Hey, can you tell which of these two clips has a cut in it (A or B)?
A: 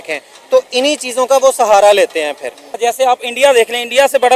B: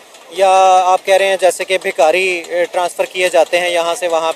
A